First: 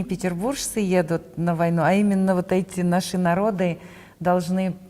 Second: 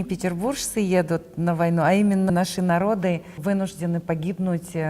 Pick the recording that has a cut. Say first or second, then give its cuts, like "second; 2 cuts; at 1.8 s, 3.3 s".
second; 2 cuts; at 2.3 s, 3.4 s